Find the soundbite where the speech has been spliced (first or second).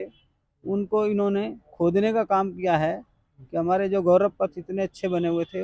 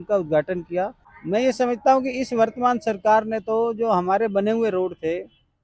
second